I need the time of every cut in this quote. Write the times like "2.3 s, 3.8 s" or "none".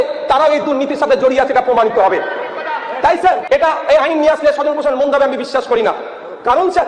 3.4 s

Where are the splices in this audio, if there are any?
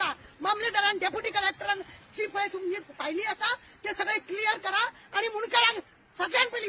none

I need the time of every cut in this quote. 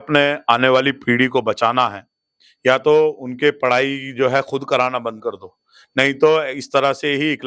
none

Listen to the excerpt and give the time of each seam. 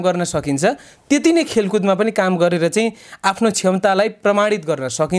none

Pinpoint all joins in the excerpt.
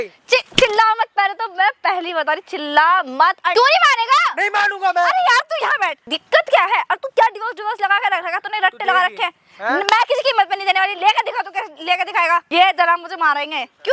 3.5 s, 6.1 s, 12.5 s

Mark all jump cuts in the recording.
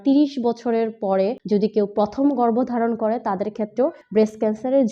1.4 s, 4.0 s

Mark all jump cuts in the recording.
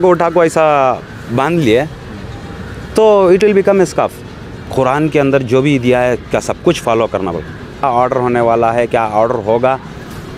4.6 s, 7.8 s

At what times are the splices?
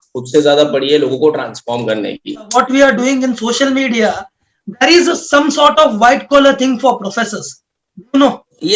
2.5 s

